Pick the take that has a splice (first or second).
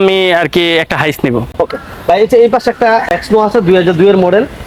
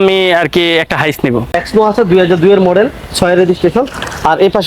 second